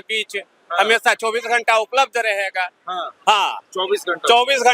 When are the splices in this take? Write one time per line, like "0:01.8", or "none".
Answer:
none